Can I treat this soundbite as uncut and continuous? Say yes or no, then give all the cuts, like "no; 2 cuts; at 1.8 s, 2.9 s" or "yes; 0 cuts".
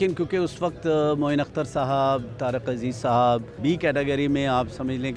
no; 1 cut; at 3.5 s